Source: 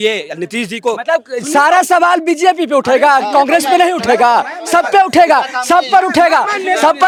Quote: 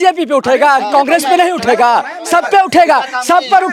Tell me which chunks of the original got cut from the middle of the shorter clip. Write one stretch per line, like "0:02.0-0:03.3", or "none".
none